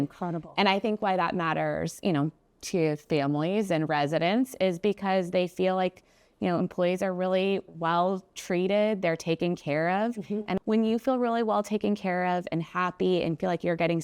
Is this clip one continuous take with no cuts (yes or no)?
no